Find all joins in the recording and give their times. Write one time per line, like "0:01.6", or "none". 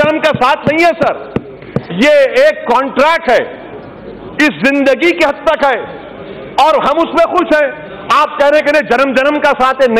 none